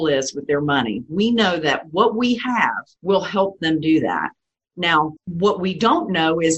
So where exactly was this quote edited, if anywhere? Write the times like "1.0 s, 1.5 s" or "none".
2.9 s, 5.2 s